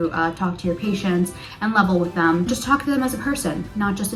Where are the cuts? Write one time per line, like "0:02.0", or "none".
none